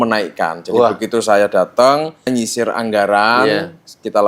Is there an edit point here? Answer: yes; 1 cut; at 2.3 s

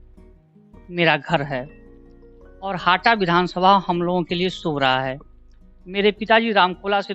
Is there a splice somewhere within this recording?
no; 0 cuts

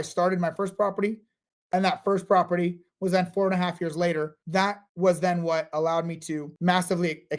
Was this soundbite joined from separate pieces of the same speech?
yes; 2 cuts; at 4.4 s, 6.5 s

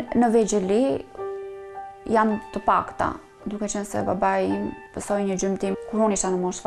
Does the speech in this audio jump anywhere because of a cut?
yes; 2 cuts; at 4.8 s, 5.7 s

